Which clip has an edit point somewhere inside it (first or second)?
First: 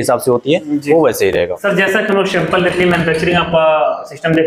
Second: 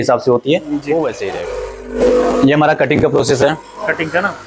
second